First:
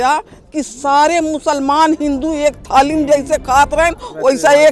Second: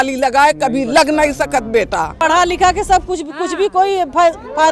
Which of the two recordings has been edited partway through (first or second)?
second